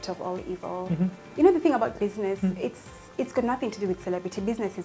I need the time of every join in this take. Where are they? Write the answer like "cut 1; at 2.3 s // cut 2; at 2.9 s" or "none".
cut 1; at 1.2 s